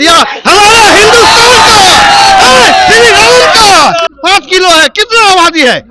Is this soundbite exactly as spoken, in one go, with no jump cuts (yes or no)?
no